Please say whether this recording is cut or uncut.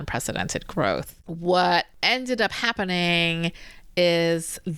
cut